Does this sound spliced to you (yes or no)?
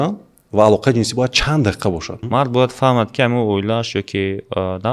yes